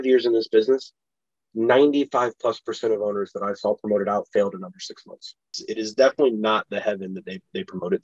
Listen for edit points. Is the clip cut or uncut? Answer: cut